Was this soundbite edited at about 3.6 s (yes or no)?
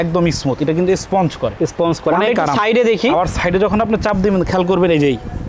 no